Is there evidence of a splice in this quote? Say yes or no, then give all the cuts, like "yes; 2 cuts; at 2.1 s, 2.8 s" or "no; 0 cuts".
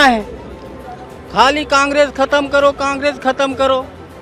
no; 0 cuts